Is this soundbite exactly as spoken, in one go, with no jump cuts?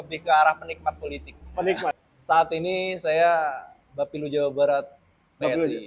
no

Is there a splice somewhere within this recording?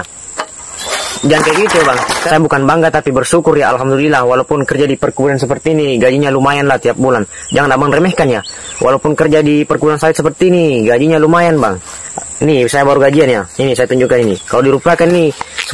no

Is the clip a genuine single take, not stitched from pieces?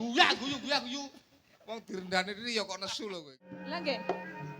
no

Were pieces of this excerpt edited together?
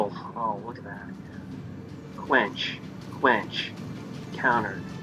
no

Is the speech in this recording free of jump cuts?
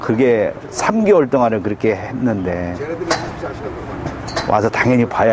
yes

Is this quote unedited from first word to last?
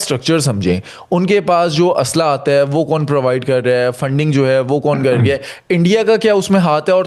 yes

